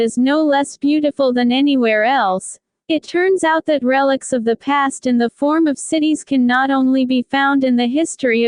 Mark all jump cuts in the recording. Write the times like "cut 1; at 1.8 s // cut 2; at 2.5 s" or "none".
none